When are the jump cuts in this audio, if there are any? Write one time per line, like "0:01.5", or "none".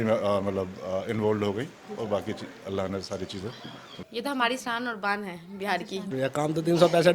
0:04.0
0:06.1